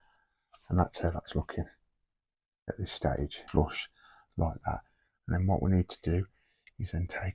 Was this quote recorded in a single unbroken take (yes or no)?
no